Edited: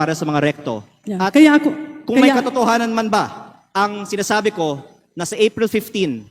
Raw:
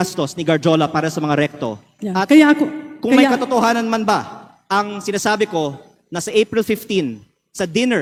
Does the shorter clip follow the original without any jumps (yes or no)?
yes